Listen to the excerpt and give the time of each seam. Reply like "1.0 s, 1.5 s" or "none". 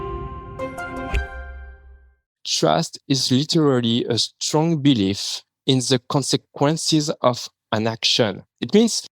2.4 s